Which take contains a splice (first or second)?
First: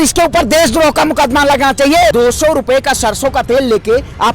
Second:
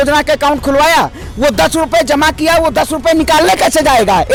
first